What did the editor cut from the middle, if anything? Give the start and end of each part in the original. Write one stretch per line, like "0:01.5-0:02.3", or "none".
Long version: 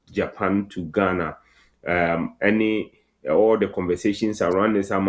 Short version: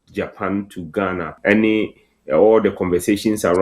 0:01.4-0:02.3